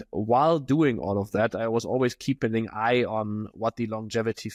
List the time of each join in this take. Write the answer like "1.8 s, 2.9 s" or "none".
none